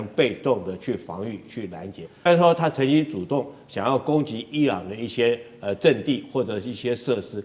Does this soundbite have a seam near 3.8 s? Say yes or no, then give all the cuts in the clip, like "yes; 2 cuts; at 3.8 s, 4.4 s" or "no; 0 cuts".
no; 1 cut; at 2.3 s